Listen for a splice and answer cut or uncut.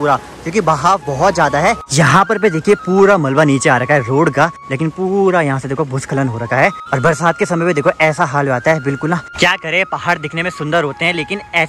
cut